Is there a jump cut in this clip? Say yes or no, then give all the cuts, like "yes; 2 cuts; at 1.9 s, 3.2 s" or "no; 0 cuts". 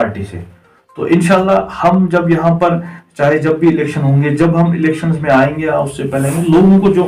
no; 0 cuts